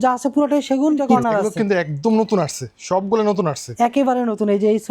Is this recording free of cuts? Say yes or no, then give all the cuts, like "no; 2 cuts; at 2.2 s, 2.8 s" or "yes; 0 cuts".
no; 1 cut; at 1.1 s